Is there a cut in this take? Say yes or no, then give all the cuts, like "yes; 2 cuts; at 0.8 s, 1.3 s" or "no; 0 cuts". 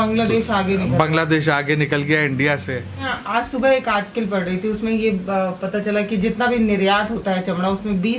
yes; 1 cut; at 3.1 s